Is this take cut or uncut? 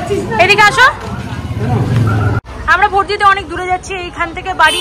uncut